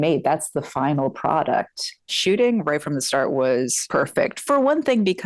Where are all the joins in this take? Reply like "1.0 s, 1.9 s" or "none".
2.1 s, 3.8 s